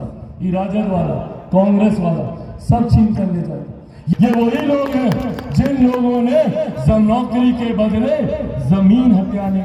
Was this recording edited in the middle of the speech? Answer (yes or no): yes